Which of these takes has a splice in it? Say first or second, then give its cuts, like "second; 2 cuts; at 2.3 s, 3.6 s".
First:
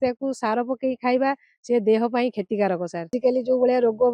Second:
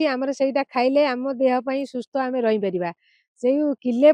first; 1 cut; at 3.1 s